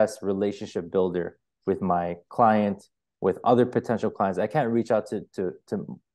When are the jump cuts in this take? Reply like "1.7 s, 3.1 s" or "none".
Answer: none